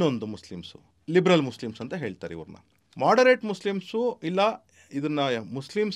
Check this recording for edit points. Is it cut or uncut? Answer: uncut